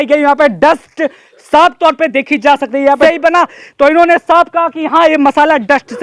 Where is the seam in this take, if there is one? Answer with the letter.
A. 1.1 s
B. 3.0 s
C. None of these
B